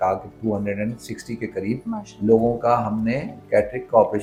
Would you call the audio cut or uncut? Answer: uncut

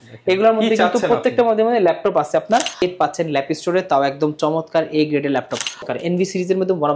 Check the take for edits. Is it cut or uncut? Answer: cut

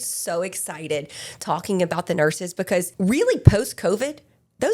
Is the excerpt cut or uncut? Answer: cut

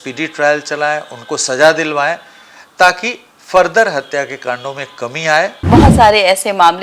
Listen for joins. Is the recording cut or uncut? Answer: cut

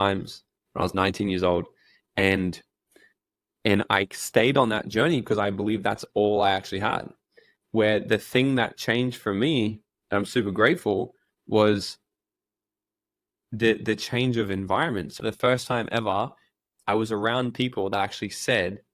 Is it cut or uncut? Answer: cut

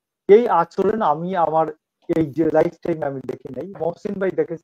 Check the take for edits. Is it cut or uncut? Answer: uncut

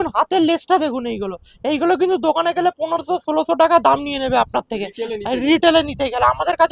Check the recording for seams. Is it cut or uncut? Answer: uncut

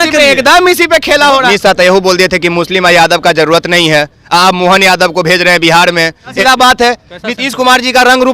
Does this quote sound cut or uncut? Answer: cut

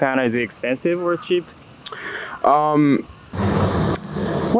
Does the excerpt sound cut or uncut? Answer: cut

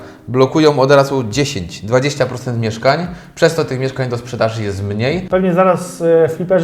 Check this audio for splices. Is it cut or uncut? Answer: cut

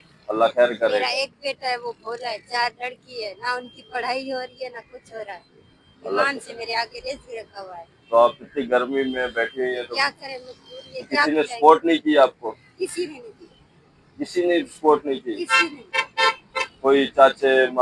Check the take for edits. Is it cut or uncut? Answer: uncut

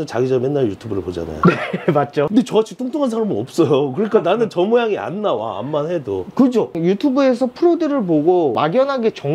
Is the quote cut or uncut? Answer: uncut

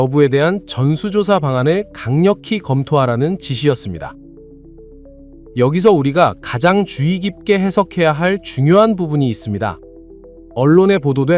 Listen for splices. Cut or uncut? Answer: uncut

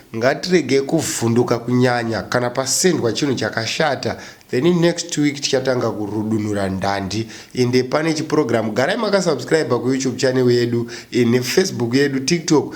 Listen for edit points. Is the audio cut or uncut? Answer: cut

